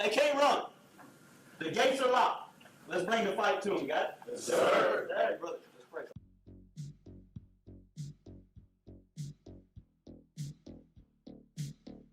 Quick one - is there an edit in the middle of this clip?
yes; 1 cut; at 10.3 s

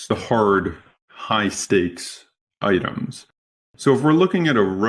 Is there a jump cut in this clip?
no; 0 cuts

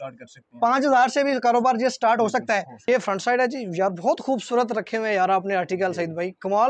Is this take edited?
yes; 1 cut; at 2.8 s

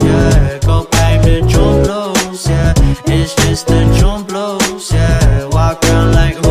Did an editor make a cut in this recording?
yes; 1 cut; at 0.9 s

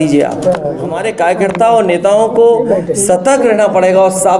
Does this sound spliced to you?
yes; 1 cut; at 0.9 s

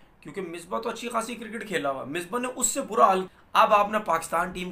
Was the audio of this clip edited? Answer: yes; 1 cut; at 3.4 s

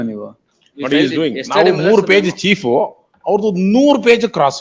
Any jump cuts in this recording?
no; 0 cuts

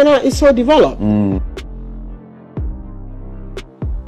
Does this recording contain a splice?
no; 0 cuts

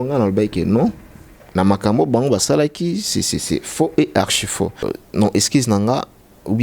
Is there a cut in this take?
yes; 1 cut; at 5.0 s

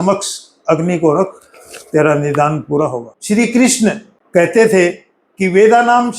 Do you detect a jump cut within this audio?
yes; 1 cut; at 3.1 s

